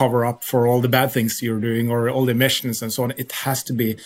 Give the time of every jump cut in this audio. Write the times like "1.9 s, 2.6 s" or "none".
none